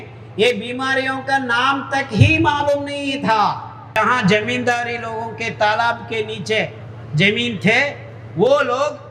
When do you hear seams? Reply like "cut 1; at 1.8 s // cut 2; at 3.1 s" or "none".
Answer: cut 1; at 4.0 s